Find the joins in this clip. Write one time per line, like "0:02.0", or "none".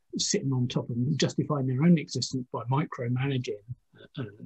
0:01.1